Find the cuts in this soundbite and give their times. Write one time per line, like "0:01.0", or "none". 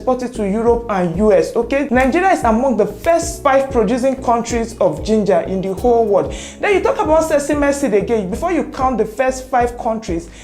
0:01.9
0:03.3